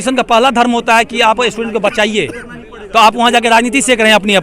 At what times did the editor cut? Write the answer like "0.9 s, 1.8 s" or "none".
none